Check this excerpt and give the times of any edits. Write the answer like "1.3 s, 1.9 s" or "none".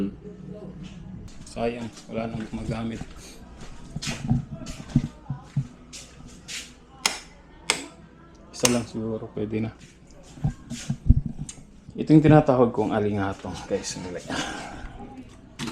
1.3 s